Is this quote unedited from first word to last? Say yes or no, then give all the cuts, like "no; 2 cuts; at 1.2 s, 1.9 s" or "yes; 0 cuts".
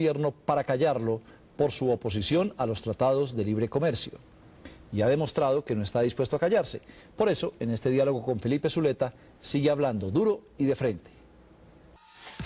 yes; 0 cuts